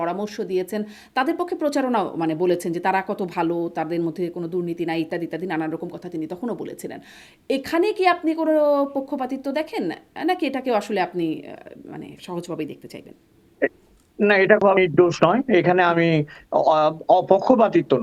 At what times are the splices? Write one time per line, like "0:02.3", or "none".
none